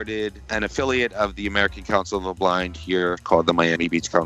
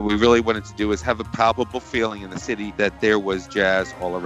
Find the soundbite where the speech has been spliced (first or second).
first